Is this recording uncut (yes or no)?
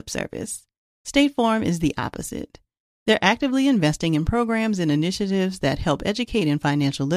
yes